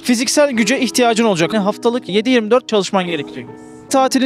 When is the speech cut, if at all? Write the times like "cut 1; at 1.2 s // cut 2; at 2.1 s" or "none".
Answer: cut 1; at 1.5 s